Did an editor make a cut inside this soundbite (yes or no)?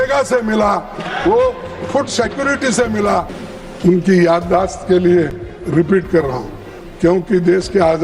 yes